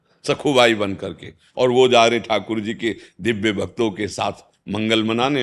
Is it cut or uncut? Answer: uncut